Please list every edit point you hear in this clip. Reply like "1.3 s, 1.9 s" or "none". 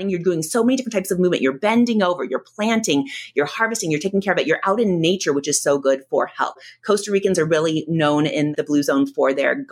6.6 s, 8.5 s

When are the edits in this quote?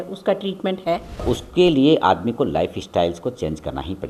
1.2 s

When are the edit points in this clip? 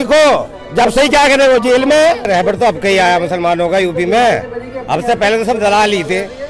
2.3 s

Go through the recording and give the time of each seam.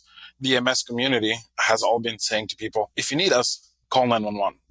3.0 s

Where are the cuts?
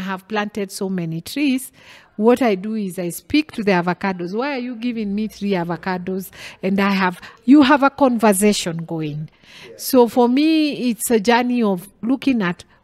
none

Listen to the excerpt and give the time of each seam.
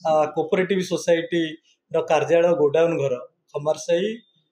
none

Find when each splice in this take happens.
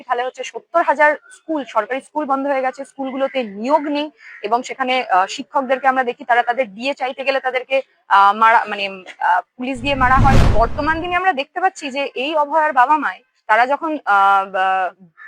10.5 s

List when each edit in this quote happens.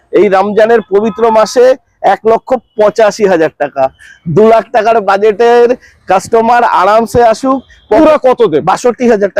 8.0 s

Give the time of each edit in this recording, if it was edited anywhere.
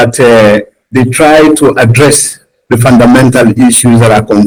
none

